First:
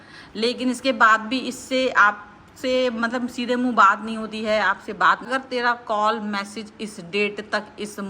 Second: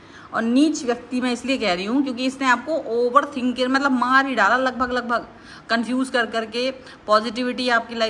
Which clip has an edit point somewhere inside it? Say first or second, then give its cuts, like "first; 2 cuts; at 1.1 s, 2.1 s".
first; 1 cut; at 5.3 s